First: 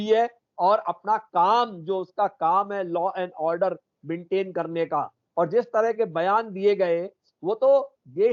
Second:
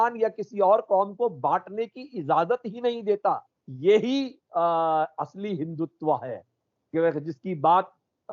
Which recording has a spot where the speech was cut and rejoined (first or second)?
second